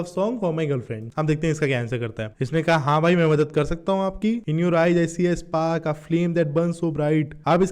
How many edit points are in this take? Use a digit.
3